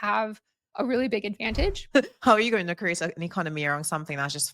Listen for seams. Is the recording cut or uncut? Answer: cut